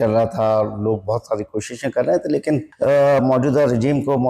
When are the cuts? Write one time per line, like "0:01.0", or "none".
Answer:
0:02.7